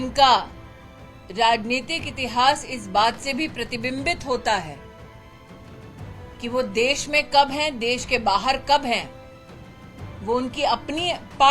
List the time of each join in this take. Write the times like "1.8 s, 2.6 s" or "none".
4.8 s, 6.4 s